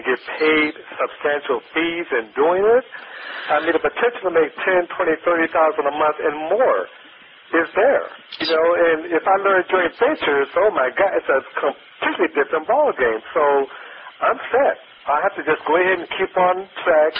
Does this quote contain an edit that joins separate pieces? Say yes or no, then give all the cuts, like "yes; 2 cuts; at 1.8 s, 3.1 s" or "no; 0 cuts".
no; 0 cuts